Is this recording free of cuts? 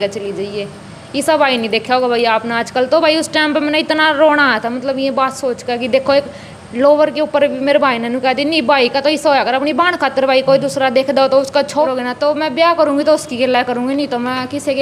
no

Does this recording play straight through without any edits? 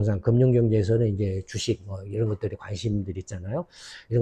yes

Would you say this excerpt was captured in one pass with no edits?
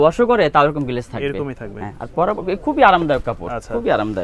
yes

